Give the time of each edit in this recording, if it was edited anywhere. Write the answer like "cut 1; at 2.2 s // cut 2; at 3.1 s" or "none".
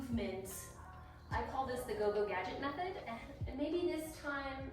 cut 1; at 1.2 s // cut 2; at 3.0 s